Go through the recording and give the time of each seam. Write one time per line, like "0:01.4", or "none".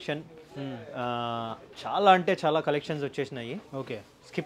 none

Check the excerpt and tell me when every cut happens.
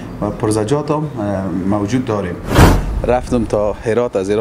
0:02.7

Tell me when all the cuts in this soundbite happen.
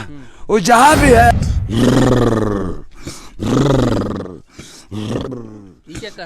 0:01.3

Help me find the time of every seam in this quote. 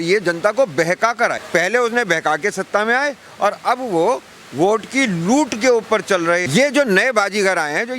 0:01.4
0:06.5

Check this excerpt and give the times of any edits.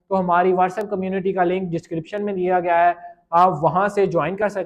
none

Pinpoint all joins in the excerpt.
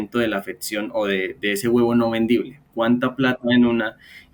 none

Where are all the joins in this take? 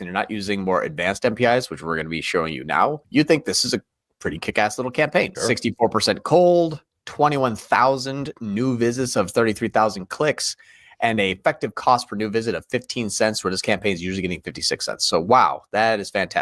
0:03.0
0:05.3

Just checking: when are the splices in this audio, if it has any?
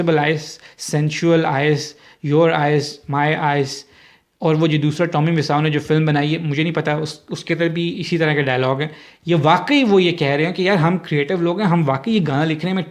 none

